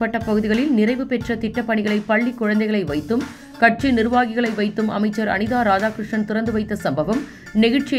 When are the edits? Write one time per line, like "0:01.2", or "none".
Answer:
none